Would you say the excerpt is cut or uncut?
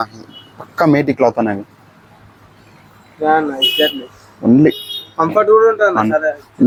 uncut